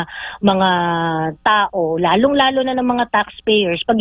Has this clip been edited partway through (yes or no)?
no